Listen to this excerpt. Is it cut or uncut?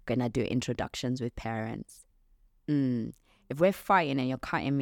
uncut